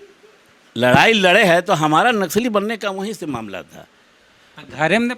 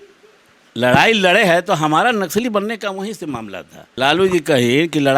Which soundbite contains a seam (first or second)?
second